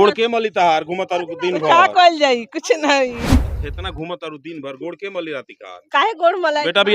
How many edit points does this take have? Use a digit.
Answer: 1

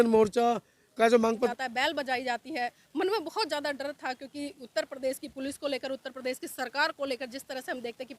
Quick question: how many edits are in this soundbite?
1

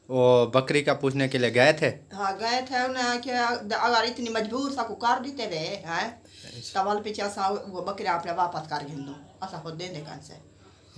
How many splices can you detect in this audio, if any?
0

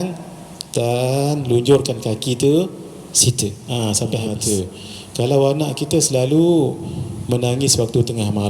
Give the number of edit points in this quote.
1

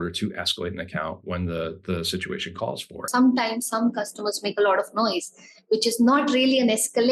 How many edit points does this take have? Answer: 1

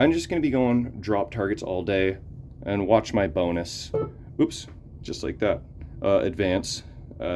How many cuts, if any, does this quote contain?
0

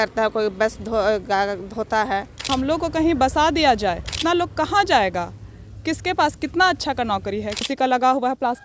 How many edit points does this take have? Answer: 3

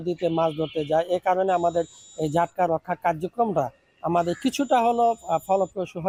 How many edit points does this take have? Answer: 0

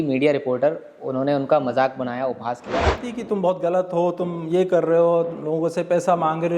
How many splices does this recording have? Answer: 1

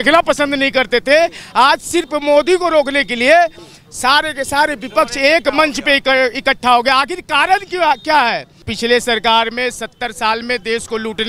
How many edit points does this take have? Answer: 1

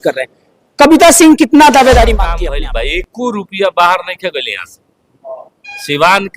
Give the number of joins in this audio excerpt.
1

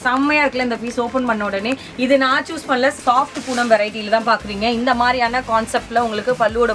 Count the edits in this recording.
1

